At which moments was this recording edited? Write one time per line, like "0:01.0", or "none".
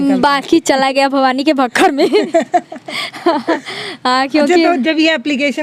none